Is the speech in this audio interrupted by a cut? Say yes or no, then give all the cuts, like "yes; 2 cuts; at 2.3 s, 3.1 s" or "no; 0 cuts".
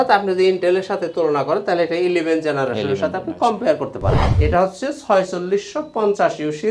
yes; 1 cut; at 4.2 s